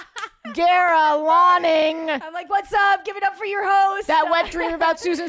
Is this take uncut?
no; 1 cut; at 4.0 s

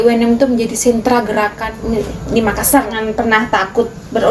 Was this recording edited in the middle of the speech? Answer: yes; 2 cuts; at 1.7 s, 3.0 s

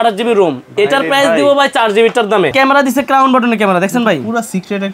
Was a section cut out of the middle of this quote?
yes; 1 cut; at 2.5 s

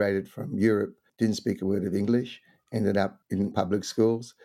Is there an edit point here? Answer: yes; 2 cuts; at 1.0 s, 3.5 s

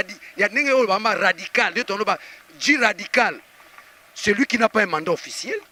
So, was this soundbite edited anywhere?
no; 0 cuts

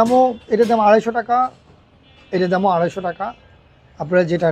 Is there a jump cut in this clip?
no; 0 cuts

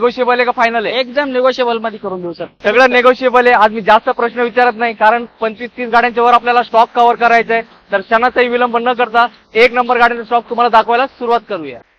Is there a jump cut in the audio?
no; 0 cuts

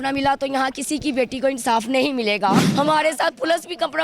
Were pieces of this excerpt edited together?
yes; 1 cut; at 2.6 s

